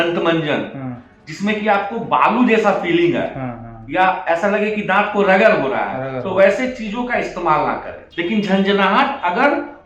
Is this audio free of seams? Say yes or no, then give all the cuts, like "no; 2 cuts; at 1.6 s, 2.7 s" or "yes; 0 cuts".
no; 1 cut; at 8.0 s